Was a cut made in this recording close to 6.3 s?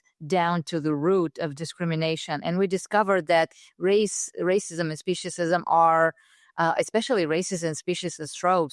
no; 0 cuts

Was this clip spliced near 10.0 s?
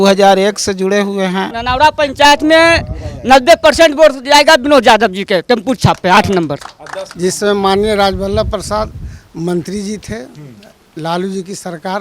no; 2 cuts; at 1.5 s, 7.0 s

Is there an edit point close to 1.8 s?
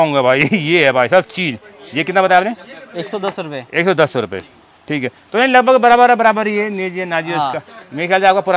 no; 0 cuts

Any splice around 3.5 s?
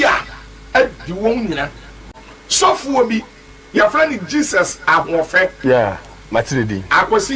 no; 1 cut; at 2.1 s

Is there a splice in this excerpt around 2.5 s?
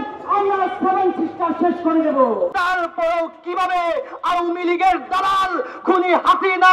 yes; 1 cut; at 2.5 s

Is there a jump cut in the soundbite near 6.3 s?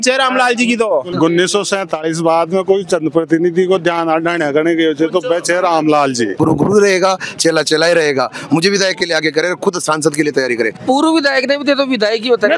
yes; 3 cuts; at 1.1 s, 6.3 s, 10.8 s

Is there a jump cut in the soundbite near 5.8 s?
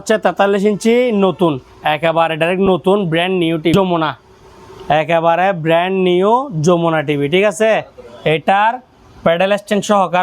no; 1 cut; at 3.7 s

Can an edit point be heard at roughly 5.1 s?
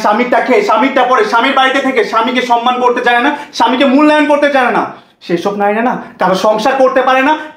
no; 0 cuts

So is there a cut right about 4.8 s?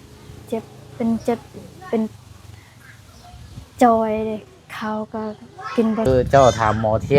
no; 1 cut; at 6.1 s

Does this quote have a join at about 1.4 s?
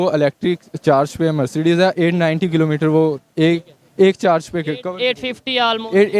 no; 0 cuts

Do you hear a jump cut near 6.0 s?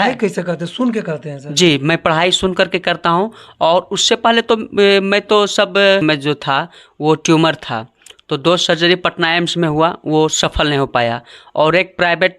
yes; 1 cut; at 6.0 s

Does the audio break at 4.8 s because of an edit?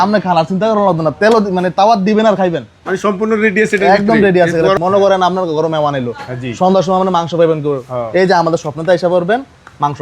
yes; 1 cut; at 4.8 s

